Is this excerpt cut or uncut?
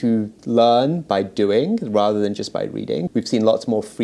cut